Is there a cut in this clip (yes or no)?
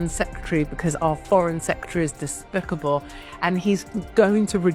no